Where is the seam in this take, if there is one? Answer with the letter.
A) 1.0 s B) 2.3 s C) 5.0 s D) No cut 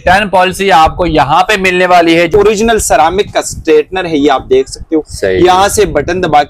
B